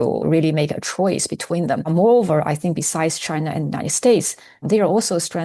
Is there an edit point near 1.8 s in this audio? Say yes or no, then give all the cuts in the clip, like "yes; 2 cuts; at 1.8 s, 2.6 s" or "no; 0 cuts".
no; 0 cuts